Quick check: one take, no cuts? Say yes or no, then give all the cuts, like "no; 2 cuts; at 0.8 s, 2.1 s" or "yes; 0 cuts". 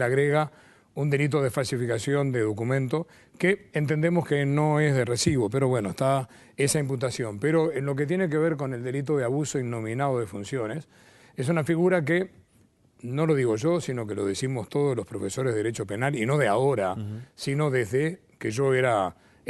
no; 1 cut; at 12.0 s